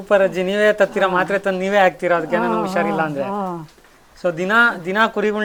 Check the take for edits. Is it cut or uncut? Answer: uncut